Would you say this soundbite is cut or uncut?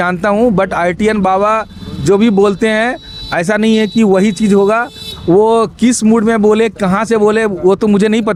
uncut